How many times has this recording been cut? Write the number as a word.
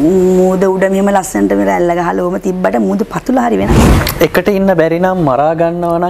one